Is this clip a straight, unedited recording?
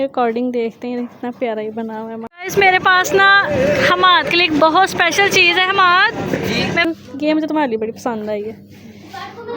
no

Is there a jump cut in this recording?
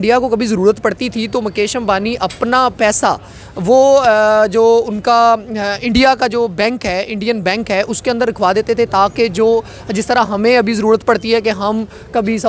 no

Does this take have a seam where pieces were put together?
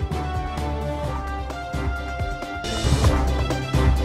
no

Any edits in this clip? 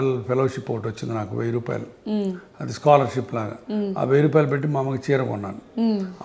no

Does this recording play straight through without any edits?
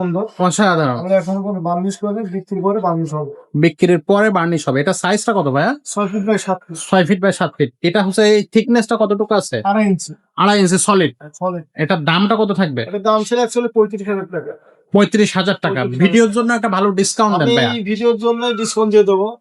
yes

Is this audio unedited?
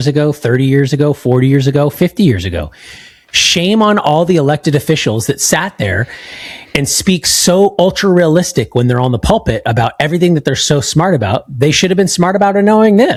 yes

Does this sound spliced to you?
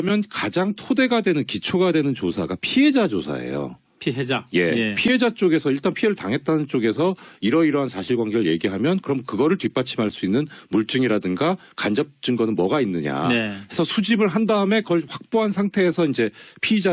yes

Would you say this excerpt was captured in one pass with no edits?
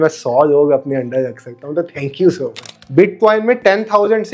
no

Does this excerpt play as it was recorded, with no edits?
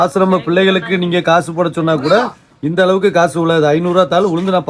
yes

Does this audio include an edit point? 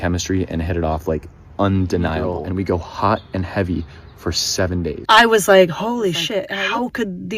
yes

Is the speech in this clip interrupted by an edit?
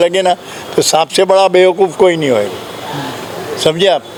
no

